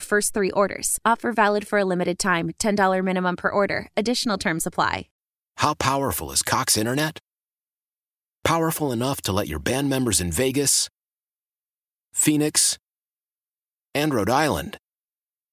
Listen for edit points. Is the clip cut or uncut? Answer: cut